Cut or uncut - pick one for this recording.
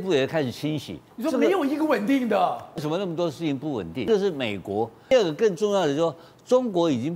cut